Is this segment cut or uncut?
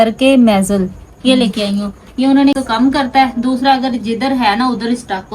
cut